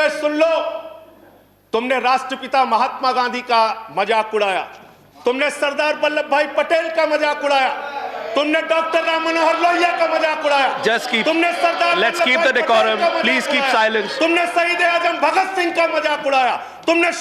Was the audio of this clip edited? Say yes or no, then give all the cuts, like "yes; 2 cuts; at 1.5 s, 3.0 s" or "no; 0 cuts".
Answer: no; 0 cuts